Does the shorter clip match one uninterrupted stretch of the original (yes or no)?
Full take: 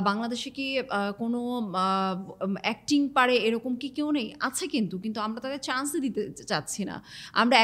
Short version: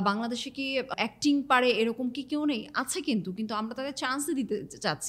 no